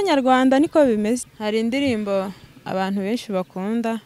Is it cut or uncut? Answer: cut